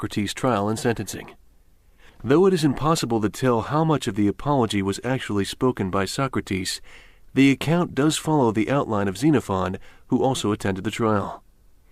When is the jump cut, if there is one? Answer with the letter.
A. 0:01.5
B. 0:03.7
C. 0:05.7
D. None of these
C